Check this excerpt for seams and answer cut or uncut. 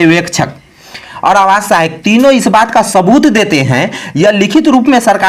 uncut